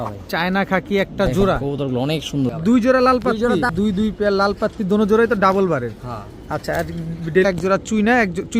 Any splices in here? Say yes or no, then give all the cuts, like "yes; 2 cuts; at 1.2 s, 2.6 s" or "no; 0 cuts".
yes; 3 cuts; at 2.6 s, 3.7 s, 7.5 s